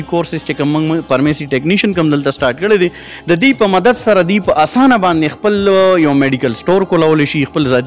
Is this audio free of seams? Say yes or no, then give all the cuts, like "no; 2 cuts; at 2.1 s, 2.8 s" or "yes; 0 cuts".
yes; 0 cuts